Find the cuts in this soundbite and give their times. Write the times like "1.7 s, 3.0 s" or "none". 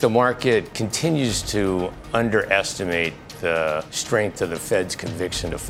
3.9 s